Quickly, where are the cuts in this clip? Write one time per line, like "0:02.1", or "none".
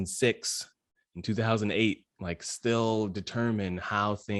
none